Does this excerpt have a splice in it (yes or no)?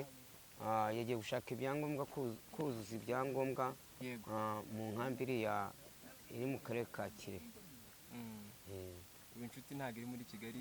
no